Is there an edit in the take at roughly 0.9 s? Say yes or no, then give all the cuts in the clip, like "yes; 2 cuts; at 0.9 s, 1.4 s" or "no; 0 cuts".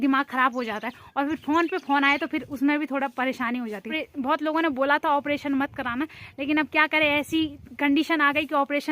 no; 1 cut; at 4.0 s